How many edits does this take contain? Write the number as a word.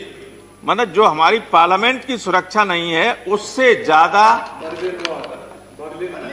zero